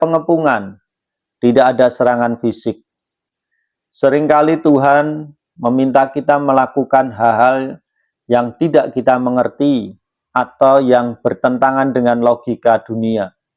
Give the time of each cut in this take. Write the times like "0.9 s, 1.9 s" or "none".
none